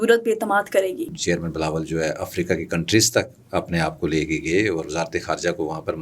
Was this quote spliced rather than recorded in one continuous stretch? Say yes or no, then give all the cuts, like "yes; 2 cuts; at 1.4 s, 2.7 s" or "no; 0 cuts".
yes; 1 cut; at 1.1 s